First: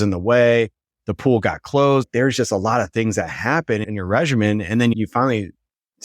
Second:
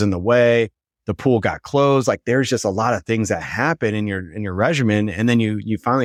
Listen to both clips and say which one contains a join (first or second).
first